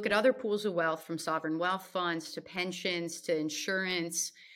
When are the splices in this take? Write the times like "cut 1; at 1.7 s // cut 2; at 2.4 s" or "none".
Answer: none